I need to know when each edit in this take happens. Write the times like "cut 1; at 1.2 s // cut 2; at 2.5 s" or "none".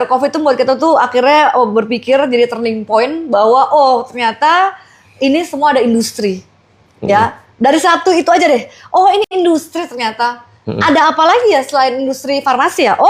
none